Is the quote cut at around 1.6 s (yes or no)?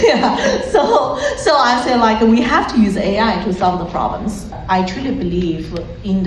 no